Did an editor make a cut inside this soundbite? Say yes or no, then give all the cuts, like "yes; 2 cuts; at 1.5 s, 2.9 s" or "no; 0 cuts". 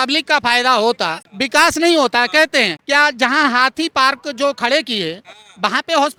no; 0 cuts